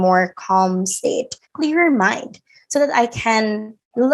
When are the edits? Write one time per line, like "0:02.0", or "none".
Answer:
0:01.4

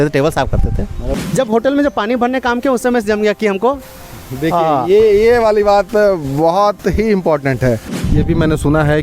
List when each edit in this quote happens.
0:01.0
0:08.0

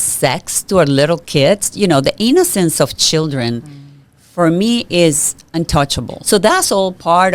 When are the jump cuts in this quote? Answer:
0:06.1

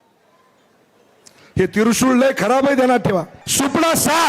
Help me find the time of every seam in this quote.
0:03.4

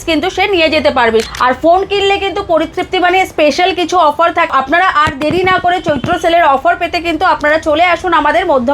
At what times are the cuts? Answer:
0:01.3
0:04.5

